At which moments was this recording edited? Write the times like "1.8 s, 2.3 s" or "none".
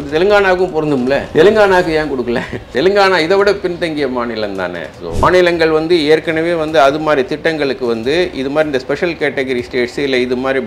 1.3 s, 2.7 s, 5.2 s